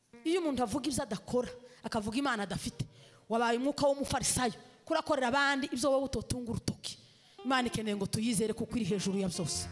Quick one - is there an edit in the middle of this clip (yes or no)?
no